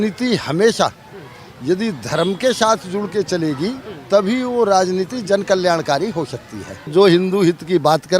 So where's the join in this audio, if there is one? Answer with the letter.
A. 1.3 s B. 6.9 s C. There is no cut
B